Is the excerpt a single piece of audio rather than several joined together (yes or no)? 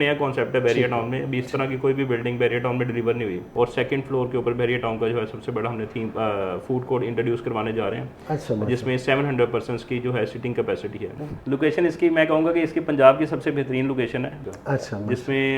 no